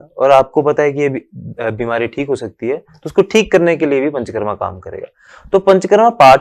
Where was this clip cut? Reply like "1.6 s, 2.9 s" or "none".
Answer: none